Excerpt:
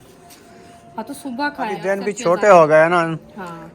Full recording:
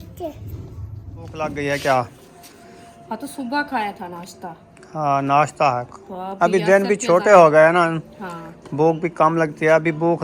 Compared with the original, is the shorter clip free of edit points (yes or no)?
no